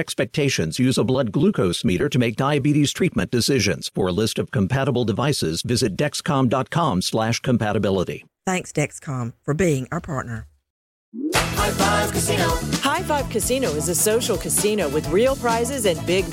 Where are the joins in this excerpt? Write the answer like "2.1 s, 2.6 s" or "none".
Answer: 11.0 s